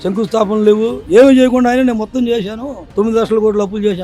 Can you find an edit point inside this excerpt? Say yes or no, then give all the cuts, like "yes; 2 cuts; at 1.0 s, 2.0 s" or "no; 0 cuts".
yes; 1 cut; at 1.0 s